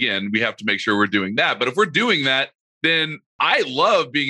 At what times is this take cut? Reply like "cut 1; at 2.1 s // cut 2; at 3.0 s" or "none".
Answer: cut 1; at 3.0 s